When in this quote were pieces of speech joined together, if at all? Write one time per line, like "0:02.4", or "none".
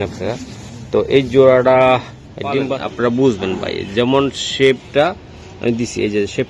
0:02.6